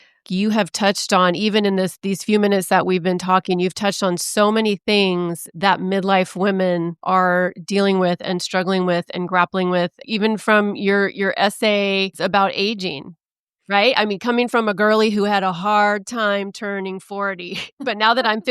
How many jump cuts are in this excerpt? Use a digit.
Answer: 4